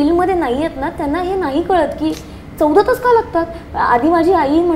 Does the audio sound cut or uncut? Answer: uncut